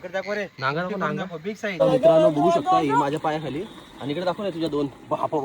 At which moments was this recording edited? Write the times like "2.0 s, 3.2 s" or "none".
1.7 s